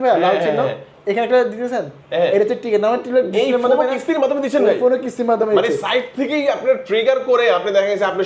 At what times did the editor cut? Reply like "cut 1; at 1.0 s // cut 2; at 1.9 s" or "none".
none